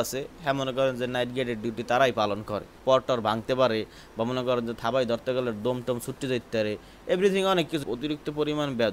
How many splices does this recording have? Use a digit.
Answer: 2